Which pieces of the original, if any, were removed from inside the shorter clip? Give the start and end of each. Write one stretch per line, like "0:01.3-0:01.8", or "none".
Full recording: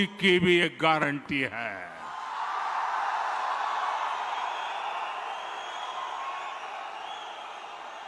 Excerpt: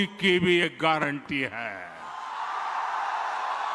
none

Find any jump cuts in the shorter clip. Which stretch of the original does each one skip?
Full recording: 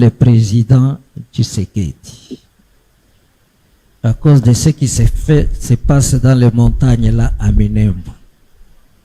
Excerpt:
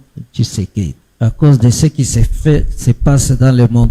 0:02.0-0:03.9

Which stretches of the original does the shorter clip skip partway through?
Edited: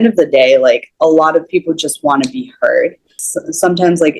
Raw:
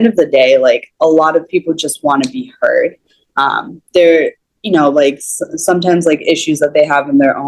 0:03.2-0:05.3

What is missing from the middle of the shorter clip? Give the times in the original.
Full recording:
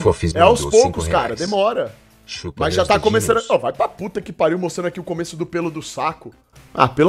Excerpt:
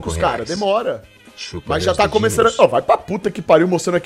none

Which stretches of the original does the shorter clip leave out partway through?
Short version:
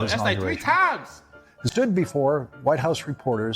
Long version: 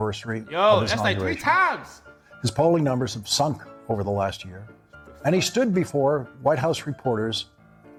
0:02.5-0:05.5

